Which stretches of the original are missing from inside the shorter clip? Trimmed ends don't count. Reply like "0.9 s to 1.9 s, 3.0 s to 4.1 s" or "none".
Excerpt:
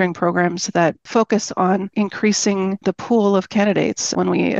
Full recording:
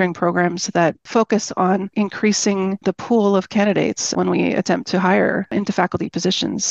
none